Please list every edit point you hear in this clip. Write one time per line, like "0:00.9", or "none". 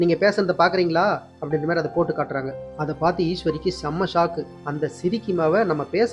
none